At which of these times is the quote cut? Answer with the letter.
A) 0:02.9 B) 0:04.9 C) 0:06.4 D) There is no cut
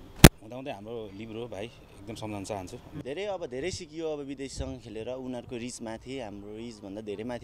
A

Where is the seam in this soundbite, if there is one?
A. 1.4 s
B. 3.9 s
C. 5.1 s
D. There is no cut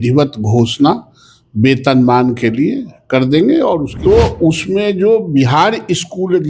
B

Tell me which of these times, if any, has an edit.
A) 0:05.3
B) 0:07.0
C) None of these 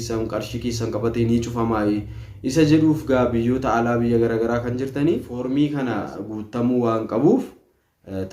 A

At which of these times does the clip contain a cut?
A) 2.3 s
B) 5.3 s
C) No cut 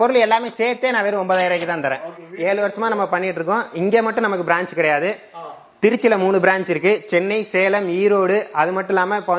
A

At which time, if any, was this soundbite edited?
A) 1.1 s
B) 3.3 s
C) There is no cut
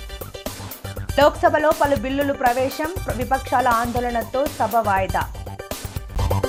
C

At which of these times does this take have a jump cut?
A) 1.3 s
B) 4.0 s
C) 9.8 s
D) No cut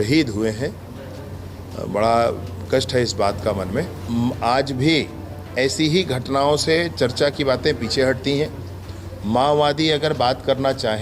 B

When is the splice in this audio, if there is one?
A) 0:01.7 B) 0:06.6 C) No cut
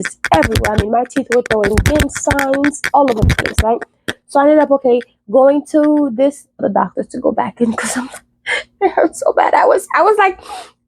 B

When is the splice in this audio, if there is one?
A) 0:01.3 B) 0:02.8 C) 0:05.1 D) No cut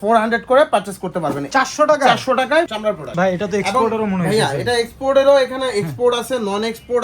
B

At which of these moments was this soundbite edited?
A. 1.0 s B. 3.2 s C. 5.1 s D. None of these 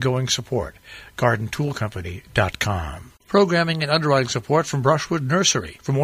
B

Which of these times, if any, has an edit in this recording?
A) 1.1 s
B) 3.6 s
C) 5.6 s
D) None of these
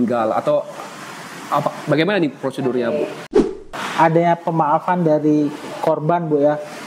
B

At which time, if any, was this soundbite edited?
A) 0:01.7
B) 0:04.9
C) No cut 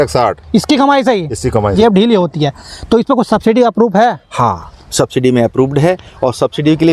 A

